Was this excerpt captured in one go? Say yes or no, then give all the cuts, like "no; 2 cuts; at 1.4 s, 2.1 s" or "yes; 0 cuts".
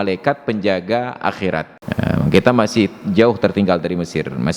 no; 1 cut; at 1.8 s